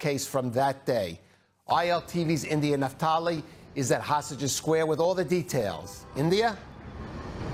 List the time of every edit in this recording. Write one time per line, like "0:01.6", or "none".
none